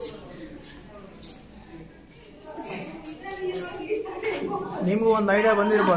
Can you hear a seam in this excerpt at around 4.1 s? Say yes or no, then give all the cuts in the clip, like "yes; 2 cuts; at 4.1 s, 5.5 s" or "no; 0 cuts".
no; 1 cut; at 2.3 s